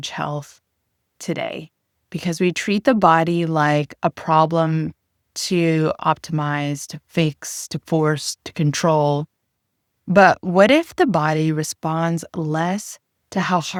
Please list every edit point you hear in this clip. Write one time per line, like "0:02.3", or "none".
none